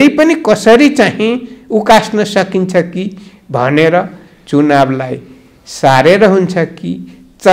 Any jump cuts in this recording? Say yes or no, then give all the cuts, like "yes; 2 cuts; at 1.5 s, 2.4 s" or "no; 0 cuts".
no; 0 cuts